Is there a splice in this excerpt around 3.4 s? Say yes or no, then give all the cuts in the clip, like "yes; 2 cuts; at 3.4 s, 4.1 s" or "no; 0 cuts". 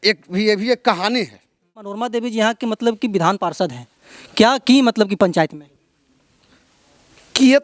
no; 1 cut; at 2.0 s